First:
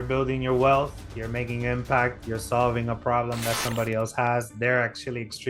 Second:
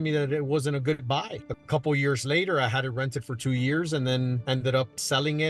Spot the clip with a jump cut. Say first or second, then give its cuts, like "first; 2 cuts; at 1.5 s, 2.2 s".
second; 1 cut; at 1.4 s